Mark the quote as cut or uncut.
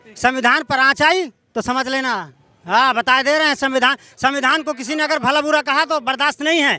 uncut